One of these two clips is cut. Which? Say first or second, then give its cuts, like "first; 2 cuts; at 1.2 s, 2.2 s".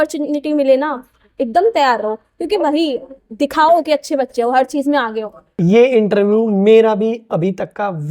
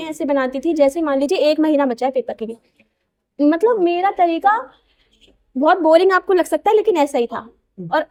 first; 1 cut; at 5.5 s